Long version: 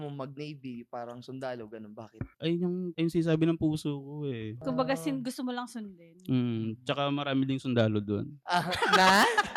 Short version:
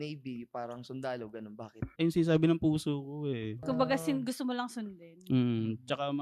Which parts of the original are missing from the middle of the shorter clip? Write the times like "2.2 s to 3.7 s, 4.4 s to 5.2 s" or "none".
2.3 s to 2.9 s

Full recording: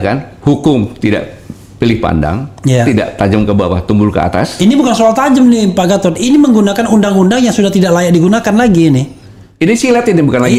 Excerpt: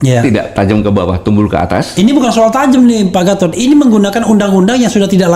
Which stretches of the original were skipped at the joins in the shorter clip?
none

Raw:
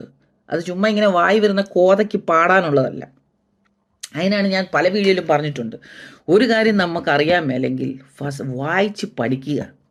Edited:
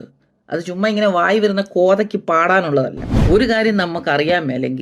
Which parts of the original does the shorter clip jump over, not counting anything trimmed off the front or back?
3.1 s to 6.1 s

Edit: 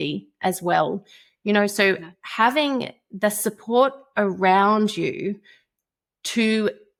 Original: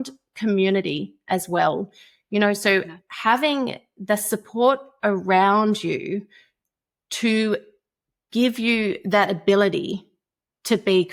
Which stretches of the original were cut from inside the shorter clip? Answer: none

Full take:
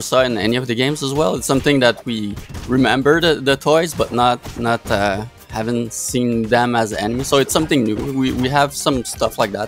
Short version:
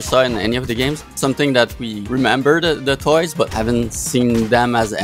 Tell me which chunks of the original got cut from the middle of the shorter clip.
1.1 s to 1.4 s, 2.2 s to 2.5 s, 4.1 s to 5.5 s

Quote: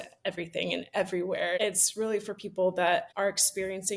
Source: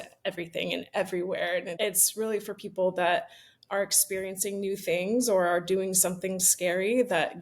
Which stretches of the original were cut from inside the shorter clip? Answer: 1.6 s to 1.8 s, 3.3 s to 3.6 s

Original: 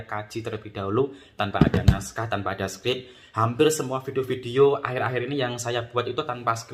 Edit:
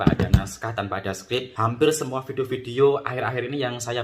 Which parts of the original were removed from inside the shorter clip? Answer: 3.0 s to 3.3 s

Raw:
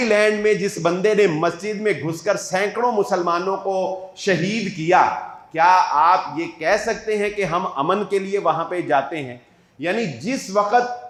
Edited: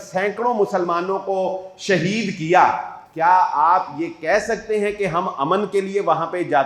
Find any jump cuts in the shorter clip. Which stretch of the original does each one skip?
none

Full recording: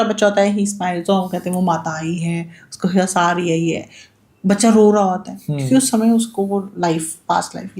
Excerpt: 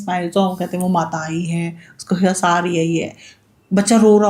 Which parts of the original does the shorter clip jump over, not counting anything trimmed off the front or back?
none

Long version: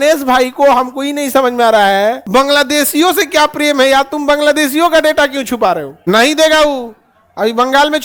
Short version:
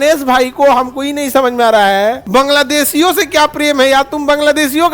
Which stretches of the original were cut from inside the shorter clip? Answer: none

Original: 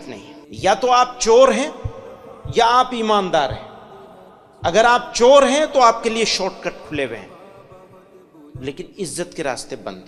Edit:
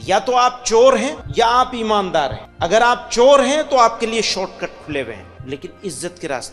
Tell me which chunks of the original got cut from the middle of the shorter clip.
1.7 s to 2.4 s, 3.6 s to 4.5 s, 7.3 s to 8.5 s

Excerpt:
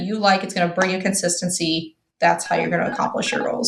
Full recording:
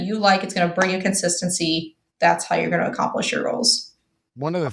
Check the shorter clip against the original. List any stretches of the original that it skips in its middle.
none

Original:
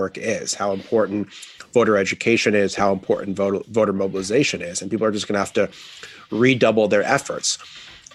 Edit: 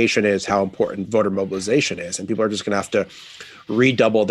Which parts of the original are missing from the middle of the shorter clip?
3.3 s to 3.7 s

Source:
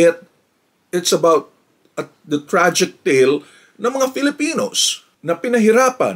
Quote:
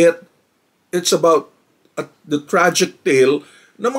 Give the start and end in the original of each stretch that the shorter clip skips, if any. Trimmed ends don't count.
none

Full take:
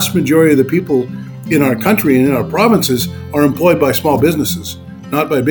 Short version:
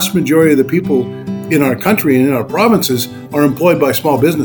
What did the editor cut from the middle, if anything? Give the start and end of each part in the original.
none

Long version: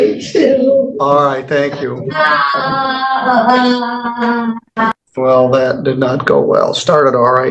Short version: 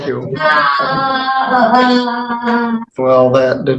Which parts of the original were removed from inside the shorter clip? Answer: 4.6 s to 5.1 s

